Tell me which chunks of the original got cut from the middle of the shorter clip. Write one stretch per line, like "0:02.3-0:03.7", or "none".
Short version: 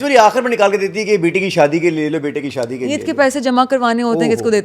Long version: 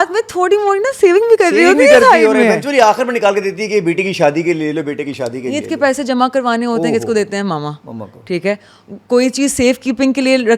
none